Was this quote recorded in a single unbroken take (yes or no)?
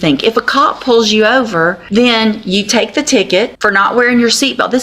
no